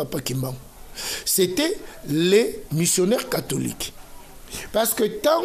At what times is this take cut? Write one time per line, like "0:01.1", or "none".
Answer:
none